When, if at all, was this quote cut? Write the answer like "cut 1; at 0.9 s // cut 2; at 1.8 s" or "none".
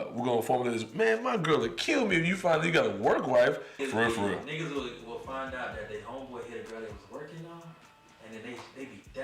cut 1; at 3.8 s